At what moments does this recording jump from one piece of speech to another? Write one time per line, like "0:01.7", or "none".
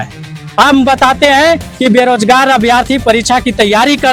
none